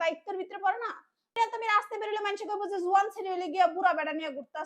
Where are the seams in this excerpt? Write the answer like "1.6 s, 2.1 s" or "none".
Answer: 1.4 s